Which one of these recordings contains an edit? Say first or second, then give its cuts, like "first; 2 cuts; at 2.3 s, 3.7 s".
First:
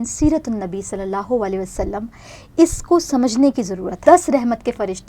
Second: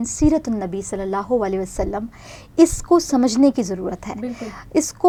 first; 1 cut; at 4.0 s